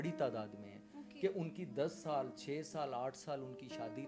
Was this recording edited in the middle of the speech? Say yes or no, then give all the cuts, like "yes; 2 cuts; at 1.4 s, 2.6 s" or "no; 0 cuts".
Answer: no; 0 cuts